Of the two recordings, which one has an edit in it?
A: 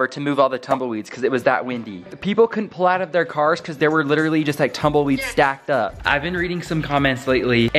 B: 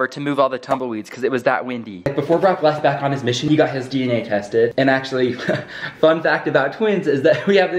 B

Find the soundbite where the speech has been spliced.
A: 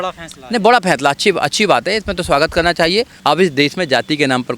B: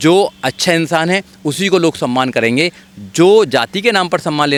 A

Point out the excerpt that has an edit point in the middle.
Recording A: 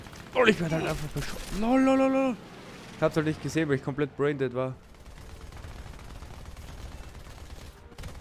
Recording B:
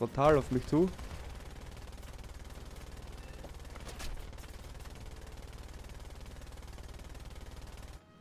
A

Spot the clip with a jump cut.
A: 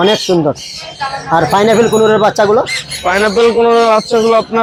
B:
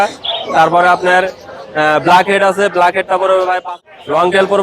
B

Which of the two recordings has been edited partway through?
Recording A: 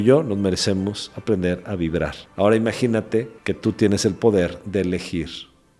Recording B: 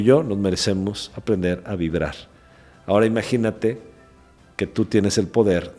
A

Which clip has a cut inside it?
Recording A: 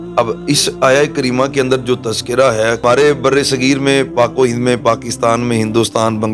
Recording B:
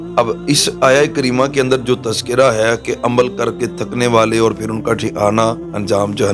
A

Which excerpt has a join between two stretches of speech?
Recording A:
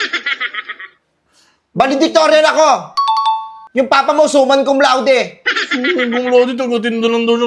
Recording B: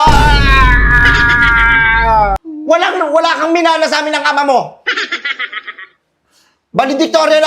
B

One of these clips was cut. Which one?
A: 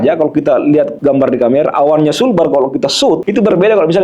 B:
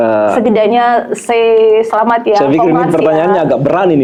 A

